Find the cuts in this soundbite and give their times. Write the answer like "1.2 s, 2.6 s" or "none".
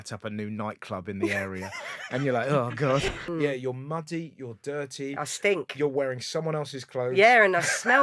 3.2 s